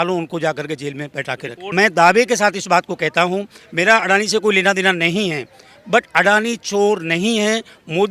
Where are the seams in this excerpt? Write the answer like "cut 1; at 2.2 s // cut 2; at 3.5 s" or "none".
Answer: cut 1; at 1.6 s